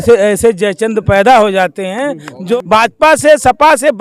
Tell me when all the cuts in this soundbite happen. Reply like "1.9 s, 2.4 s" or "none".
2.3 s